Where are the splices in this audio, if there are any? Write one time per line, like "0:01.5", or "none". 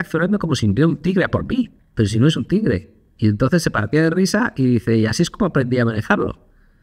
0:01.8